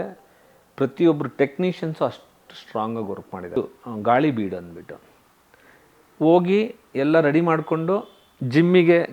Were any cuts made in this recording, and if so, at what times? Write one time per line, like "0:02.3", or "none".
0:03.6